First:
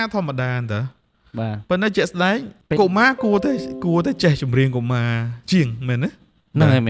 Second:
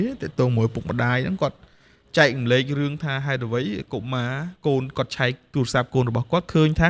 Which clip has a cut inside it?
first; 1 cut; at 2.5 s

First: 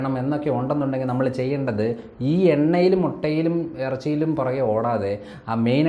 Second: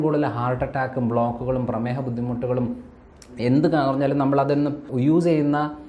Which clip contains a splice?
second; 1 cut; at 4.9 s

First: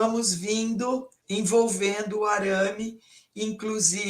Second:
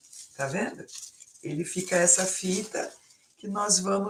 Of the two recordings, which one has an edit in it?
first; 1 cut; at 1.2 s

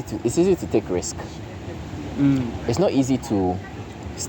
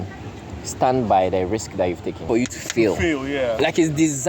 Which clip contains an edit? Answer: second; 1 cut; at 2.2 s

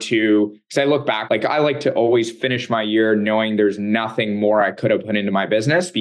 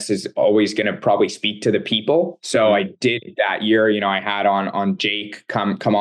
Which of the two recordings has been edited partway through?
first; 1 cut; at 1.2 s

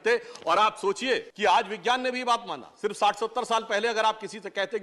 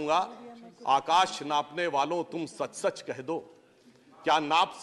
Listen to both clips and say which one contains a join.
first; 1 cut; at 1.3 s

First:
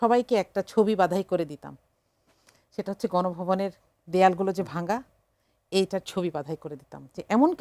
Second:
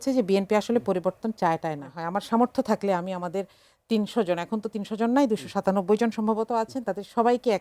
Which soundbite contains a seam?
second; 1 cut; at 2.0 s

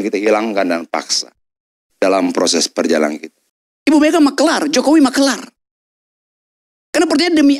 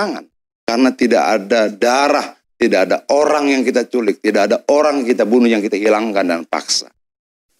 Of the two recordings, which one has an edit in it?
first; 1 cut; at 3.3 s

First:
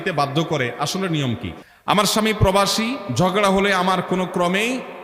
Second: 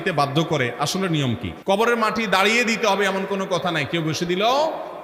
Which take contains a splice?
first; 1 cut; at 1.5 s

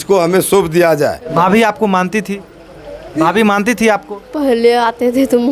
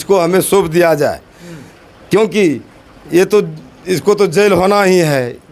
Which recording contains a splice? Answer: first; 1 cut; at 1.3 s

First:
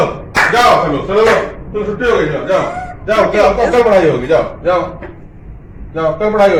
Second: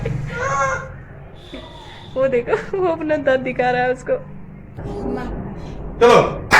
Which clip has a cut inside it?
second; 1 cut; at 4.8 s

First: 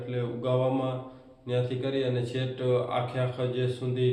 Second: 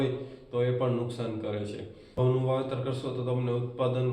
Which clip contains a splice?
second; 1 cut; at 2.2 s

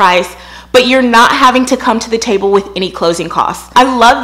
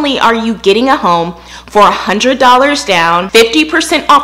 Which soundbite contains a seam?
second; 1 cut; at 3.3 s

